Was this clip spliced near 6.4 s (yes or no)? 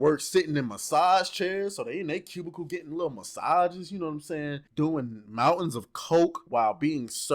yes